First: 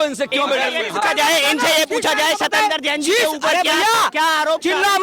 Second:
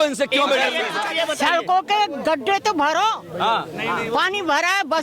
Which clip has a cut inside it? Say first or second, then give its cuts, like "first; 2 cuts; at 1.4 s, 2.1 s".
second; 1 cut; at 1.0 s